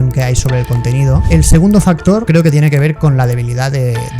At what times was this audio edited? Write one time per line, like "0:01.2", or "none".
0:01.3
0:02.3